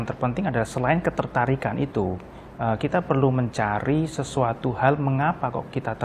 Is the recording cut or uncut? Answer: uncut